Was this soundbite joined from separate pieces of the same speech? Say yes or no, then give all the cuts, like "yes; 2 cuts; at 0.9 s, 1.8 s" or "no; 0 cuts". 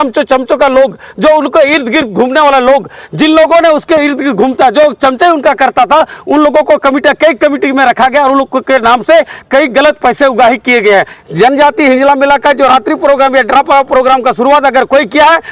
yes; 1 cut; at 11.2 s